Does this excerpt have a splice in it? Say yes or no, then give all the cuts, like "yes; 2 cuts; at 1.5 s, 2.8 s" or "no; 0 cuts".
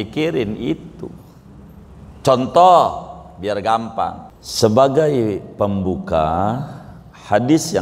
yes; 1 cut; at 4.3 s